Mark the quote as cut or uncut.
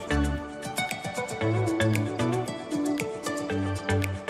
uncut